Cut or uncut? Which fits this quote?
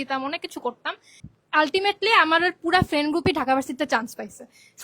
cut